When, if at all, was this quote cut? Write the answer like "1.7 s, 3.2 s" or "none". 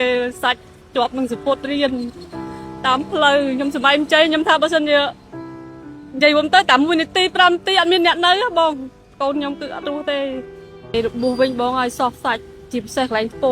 10.9 s